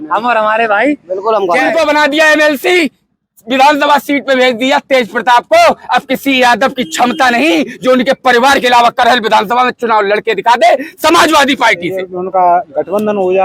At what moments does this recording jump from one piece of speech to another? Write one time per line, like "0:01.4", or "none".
0:01.7
0:12.1